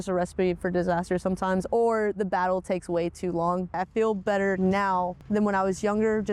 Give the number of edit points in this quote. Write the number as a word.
two